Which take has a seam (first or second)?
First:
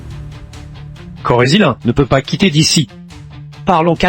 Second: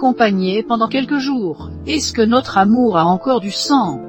first